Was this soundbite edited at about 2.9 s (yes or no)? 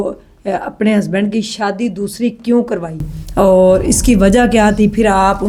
no